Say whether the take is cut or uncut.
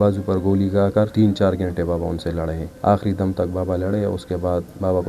cut